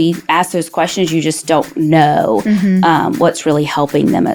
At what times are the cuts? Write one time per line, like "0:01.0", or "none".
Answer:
none